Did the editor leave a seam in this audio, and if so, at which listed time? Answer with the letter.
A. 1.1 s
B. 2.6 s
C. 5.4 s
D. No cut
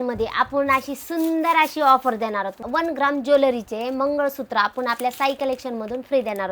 B